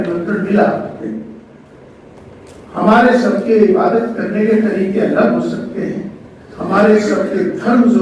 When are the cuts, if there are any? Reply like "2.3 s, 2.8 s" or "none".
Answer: 1.0 s